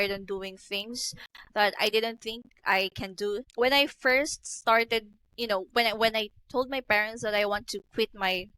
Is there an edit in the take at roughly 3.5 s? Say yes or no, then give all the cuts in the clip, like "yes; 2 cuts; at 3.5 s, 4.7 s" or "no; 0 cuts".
yes; 1 cut; at 3.5 s